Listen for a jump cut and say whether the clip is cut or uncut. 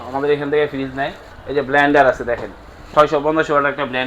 cut